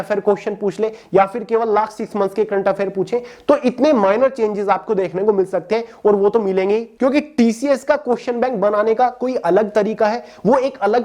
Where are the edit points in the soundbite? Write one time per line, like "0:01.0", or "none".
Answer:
none